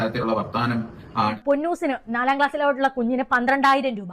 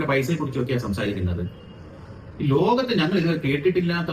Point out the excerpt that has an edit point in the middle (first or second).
first